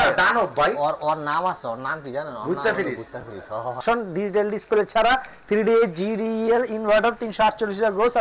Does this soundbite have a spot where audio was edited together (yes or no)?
yes